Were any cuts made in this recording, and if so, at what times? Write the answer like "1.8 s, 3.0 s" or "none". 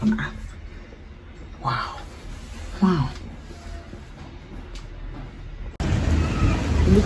5.8 s

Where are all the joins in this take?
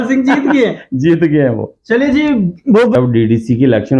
3.0 s

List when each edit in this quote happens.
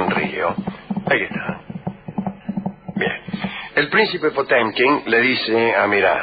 3.2 s

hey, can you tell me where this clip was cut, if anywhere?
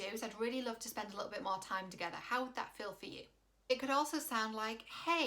none

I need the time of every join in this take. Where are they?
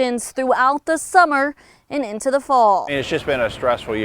2.9 s

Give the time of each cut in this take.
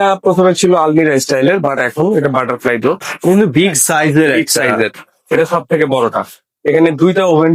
none

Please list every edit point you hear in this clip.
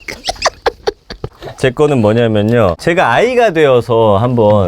1.3 s, 2.8 s

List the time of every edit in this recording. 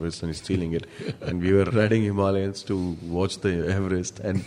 1.7 s

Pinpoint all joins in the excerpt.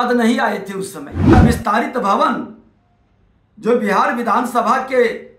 1.3 s

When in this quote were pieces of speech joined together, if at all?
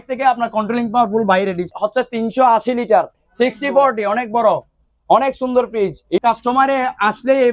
1.7 s, 3.2 s, 6.2 s

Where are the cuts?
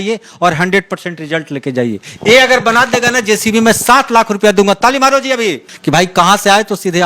2.0 s, 5.7 s

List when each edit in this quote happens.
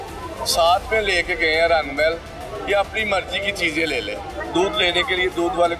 4.4 s

